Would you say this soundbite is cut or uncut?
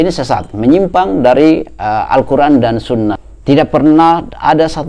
cut